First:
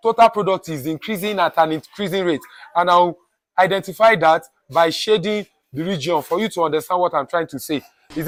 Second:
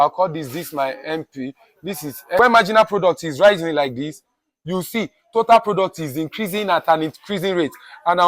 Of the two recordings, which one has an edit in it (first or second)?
second